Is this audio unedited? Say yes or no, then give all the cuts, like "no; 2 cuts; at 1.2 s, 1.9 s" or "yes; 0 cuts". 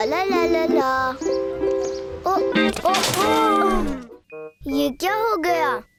yes; 0 cuts